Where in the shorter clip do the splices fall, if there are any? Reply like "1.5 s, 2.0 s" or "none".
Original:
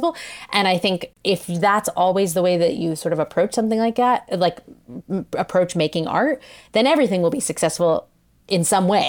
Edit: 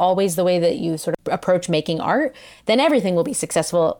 1.2 s